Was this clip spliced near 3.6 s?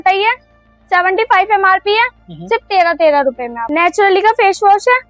yes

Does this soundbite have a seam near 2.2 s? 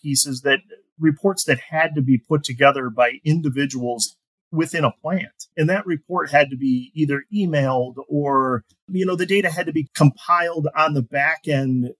no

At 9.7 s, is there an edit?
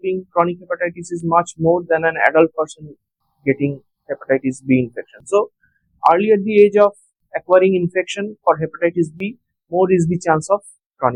no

